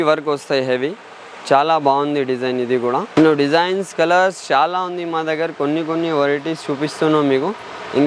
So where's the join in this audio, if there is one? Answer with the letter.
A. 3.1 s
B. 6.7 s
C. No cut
A